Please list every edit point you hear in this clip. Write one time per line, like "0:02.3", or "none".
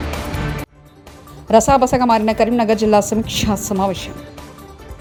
none

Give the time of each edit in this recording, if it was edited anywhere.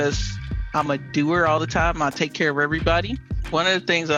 none

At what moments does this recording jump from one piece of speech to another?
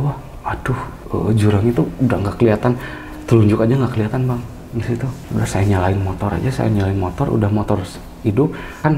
0:01.0

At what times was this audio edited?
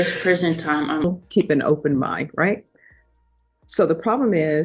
0:01.0

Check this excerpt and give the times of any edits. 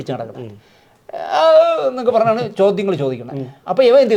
none

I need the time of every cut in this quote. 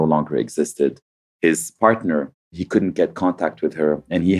0:02.5

